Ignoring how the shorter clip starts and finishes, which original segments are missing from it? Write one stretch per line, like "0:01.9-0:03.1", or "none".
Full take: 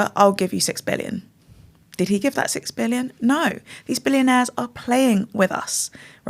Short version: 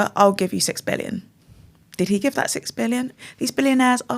0:03.1-0:03.6